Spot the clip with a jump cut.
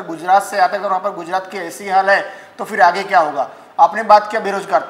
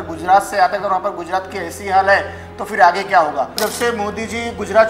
second; 1 cut; at 3.6 s

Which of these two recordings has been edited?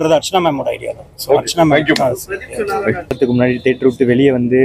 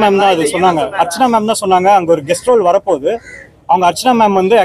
first; 1 cut; at 3.2 s

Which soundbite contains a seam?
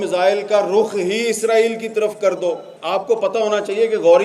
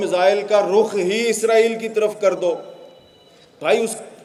first; 1 cut; at 2.7 s

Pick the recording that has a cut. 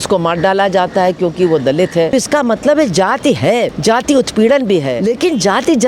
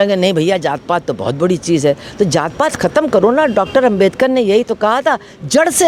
first; 3 cuts; at 2.1 s, 3.7 s, 4.9 s

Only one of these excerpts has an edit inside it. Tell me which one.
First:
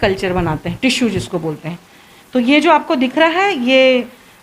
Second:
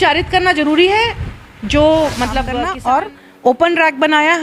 second; 1 cut; at 2.5 s

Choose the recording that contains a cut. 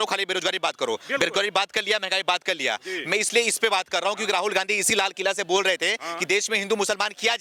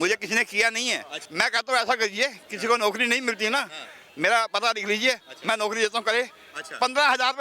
second; 1 cut; at 1.2 s

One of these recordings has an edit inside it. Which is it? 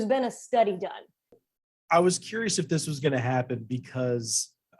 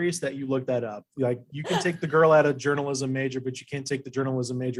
first; 1 cut; at 1.4 s

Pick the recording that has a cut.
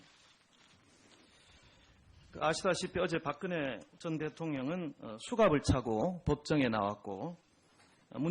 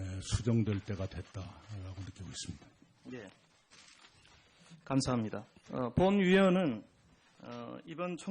first; 1 cut; at 1.8 s

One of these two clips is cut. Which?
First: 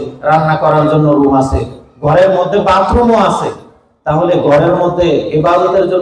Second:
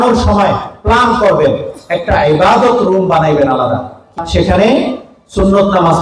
second; 1 cut; at 4.1 s

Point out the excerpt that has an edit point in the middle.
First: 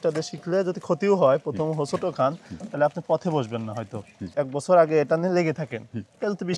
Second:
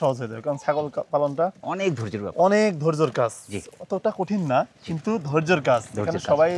first; 1 cut; at 4.4 s

